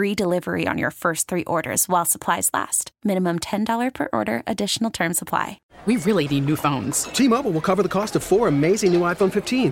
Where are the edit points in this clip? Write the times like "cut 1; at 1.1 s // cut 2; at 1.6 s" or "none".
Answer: cut 1; at 5.6 s